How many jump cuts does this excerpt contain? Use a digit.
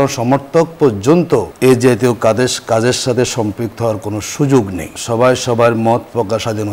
2